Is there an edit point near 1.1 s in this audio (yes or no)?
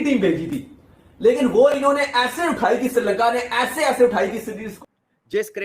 no